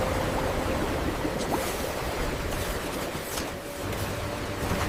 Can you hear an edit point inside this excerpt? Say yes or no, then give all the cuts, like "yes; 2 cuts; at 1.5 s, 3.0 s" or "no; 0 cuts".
no; 0 cuts